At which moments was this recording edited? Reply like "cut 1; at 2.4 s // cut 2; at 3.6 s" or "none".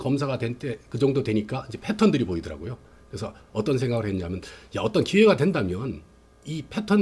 none